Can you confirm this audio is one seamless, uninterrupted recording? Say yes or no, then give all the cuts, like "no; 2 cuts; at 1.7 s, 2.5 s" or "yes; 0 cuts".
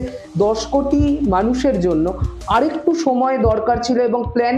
yes; 0 cuts